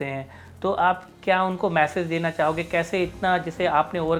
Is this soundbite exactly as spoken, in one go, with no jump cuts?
yes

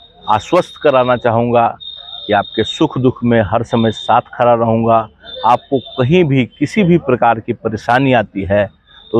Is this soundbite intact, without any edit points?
yes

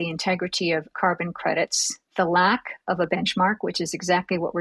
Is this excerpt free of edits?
no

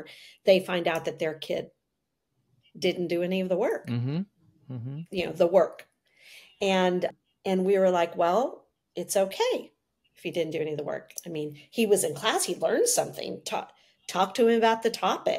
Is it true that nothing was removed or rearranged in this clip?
yes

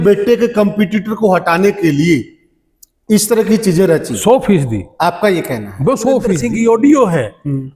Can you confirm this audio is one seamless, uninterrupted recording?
no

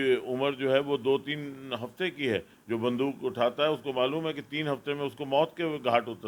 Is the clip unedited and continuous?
yes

